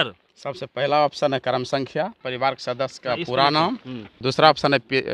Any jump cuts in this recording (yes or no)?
yes